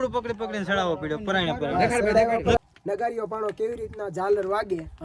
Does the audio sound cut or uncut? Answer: cut